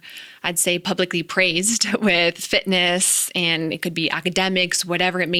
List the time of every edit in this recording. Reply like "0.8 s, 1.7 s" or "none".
none